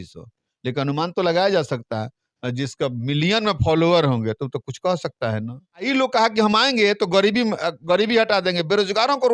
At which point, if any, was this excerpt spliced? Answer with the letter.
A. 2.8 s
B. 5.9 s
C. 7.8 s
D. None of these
B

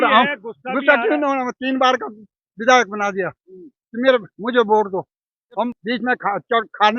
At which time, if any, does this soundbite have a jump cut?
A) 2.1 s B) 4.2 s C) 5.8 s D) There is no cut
C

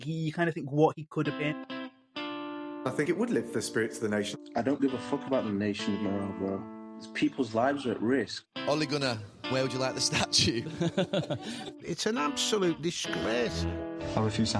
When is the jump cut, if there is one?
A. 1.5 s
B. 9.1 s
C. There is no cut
A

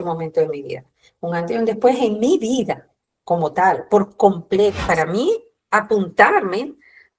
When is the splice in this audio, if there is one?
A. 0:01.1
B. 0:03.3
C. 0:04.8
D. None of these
C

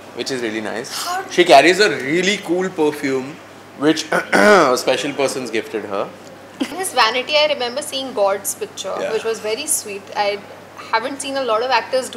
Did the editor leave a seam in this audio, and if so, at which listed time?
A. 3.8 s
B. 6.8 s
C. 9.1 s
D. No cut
B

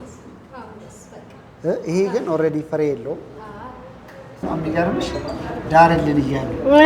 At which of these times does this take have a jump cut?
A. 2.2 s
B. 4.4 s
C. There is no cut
B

